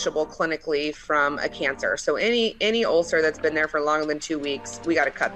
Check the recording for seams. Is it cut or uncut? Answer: uncut